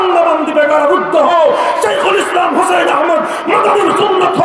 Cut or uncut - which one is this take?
uncut